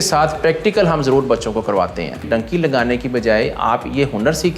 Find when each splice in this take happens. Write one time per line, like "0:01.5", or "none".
0:02.2